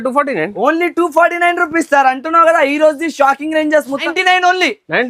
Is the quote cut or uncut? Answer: cut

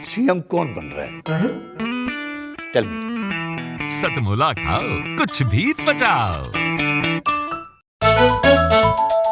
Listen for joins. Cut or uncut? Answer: cut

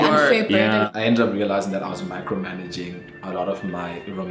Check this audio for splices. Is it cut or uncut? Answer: cut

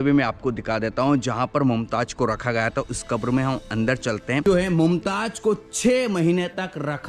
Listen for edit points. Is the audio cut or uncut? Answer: cut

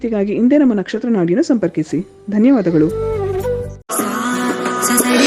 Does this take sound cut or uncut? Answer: cut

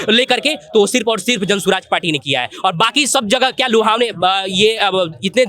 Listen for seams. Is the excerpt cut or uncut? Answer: uncut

